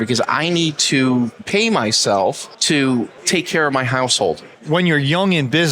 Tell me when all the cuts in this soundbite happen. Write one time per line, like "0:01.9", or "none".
0:01.4
0:02.5
0:03.2
0:04.5